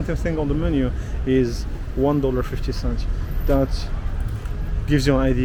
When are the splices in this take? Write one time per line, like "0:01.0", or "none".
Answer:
none